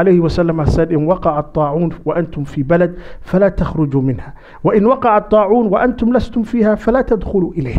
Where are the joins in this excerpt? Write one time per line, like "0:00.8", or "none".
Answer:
none